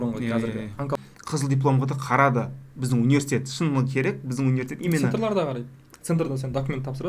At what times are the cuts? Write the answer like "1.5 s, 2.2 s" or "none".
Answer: 1.0 s